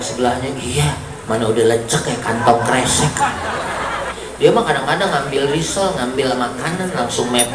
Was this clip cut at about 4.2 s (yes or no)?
yes